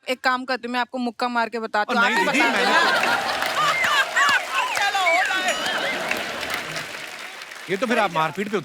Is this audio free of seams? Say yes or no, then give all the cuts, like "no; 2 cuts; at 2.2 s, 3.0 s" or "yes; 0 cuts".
yes; 0 cuts